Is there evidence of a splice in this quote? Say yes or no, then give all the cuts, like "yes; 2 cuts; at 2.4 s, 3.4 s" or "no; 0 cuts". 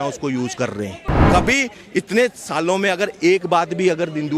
yes; 1 cut; at 1.2 s